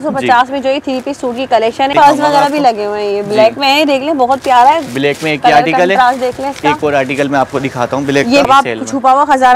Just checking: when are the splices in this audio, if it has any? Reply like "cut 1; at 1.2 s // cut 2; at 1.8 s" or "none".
cut 1; at 1.9 s // cut 2; at 8.5 s